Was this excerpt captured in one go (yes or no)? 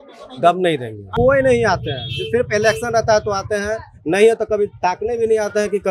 no